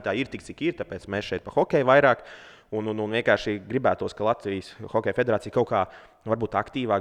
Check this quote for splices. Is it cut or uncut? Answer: uncut